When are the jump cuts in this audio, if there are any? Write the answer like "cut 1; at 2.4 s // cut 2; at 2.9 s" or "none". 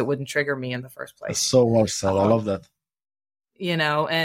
none